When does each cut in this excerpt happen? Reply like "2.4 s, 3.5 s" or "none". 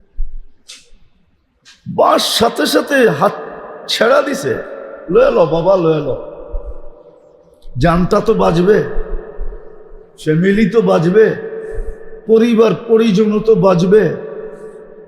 none